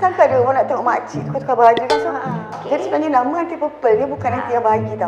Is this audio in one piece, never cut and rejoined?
no; 1 cut; at 2.5 s

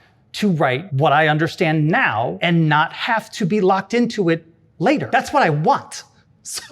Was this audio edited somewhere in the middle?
yes; 3 cuts; at 0.9 s, 2.4 s, 5.0 s

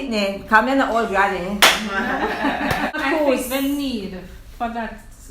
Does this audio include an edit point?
no; 0 cuts

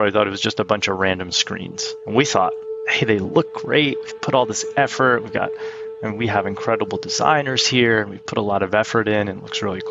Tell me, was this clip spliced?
no; 0 cuts

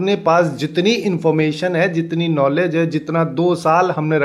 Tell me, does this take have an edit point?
no; 0 cuts

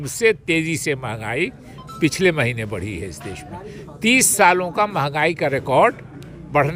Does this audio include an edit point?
no; 0 cuts

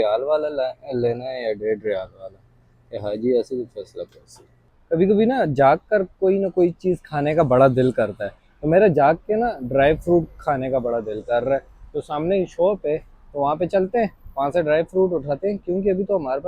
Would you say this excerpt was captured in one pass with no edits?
no; 2 cuts; at 2.9 s, 4.7 s

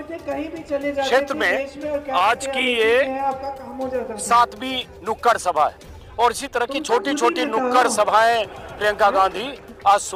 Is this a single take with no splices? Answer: yes; 0 cuts

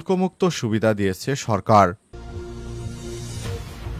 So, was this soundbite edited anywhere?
yes; 1 cut; at 2.0 s

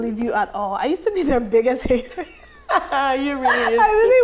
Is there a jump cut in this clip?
no; 0 cuts

